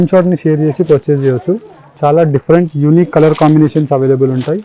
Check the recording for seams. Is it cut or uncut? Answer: uncut